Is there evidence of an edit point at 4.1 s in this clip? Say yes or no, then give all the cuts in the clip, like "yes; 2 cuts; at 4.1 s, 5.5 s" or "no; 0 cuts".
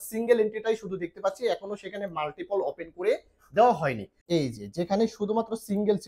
yes; 1 cut; at 4.1 s